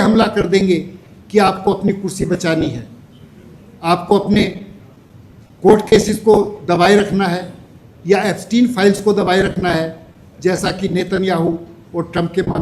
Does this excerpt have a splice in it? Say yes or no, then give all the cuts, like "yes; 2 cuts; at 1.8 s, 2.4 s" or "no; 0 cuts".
no; 0 cuts